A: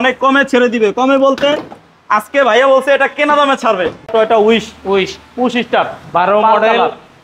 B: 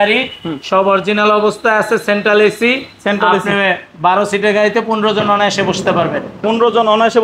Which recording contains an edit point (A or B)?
A